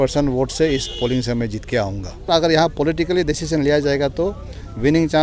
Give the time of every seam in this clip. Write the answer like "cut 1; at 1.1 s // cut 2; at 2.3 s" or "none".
cut 1; at 2.3 s